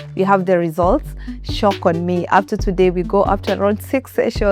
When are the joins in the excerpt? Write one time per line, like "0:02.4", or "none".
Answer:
none